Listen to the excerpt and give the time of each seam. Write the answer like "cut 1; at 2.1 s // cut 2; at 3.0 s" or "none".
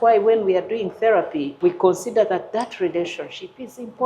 cut 1; at 1.5 s